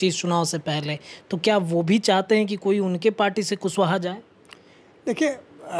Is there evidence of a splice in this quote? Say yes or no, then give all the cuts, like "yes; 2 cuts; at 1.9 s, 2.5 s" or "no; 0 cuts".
no; 0 cuts